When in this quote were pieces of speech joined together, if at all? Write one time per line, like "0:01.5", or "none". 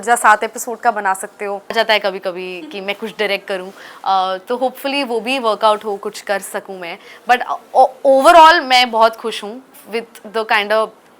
0:01.7